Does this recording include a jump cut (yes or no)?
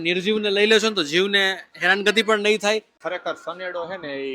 yes